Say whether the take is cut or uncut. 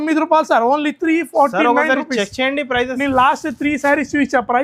uncut